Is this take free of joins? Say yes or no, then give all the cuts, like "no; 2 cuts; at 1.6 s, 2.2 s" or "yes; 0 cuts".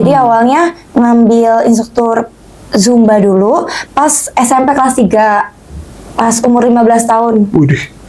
yes; 0 cuts